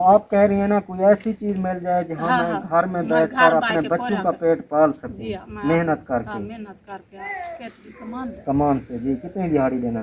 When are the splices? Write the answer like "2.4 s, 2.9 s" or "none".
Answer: 7.2 s